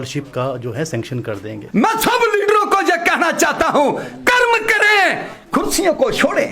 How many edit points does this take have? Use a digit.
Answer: 1